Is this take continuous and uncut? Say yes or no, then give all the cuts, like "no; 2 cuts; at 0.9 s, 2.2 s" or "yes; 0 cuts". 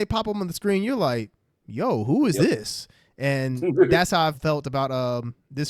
no; 1 cut; at 4.4 s